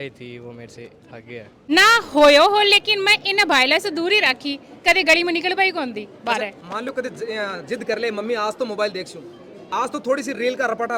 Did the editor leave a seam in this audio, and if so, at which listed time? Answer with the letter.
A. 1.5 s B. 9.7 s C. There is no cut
A